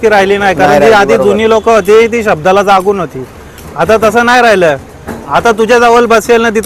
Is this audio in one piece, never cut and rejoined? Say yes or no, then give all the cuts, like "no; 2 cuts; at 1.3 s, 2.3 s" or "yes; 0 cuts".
yes; 0 cuts